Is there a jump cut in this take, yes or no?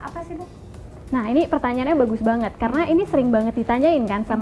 no